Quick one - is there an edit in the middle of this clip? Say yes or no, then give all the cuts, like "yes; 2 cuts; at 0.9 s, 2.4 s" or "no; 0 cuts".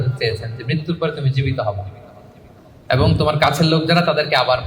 no; 0 cuts